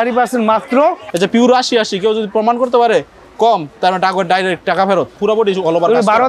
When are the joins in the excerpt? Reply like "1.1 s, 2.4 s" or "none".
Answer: 1.0 s, 5.2 s